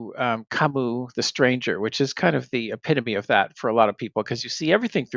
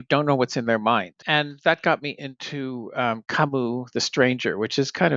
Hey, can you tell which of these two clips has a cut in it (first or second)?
second